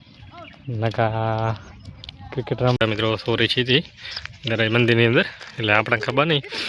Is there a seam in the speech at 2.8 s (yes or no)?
yes